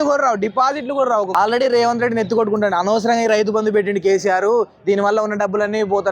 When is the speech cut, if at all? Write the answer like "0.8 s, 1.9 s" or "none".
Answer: 1.3 s